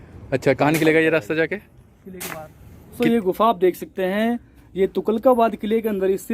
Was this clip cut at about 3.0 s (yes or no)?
yes